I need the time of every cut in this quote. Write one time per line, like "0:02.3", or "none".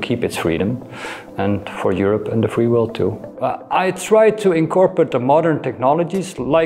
0:03.3

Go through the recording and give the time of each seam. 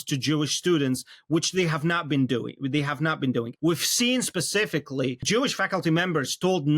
0:03.5
0:05.2

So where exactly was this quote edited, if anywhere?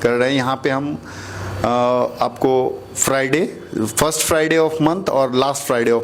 none

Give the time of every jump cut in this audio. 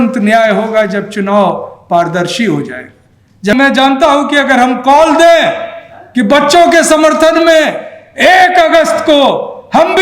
0:03.5

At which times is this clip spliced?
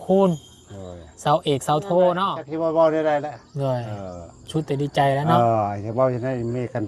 0:02.4

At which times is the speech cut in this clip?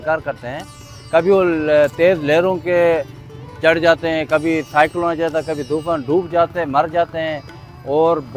none

